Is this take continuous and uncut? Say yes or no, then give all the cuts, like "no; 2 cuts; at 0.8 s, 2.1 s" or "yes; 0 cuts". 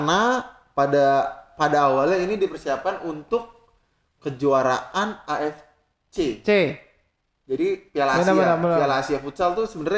yes; 0 cuts